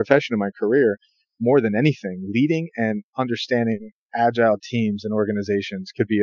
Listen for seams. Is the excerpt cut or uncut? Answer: uncut